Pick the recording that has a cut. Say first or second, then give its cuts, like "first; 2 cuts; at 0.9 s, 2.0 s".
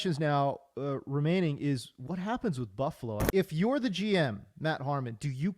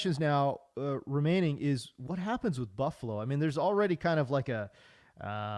first; 1 cut; at 3.3 s